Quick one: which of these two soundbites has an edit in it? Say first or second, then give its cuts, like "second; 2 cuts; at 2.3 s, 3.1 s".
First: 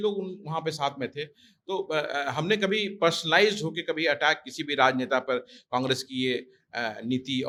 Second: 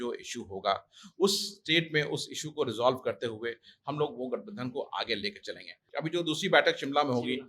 second; 1 cut; at 5.8 s